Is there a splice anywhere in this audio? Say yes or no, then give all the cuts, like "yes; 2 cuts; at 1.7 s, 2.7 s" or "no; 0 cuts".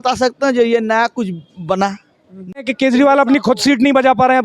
yes; 1 cut; at 2.5 s